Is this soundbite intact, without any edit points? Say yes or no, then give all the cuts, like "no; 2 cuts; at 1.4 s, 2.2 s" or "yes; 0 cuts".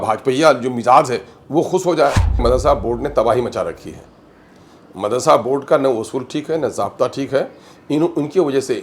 no; 1 cut; at 2.4 s